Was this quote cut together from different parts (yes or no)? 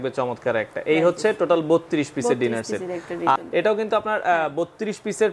yes